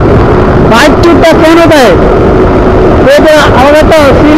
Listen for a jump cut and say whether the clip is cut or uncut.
uncut